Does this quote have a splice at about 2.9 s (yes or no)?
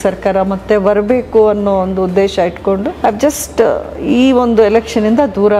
yes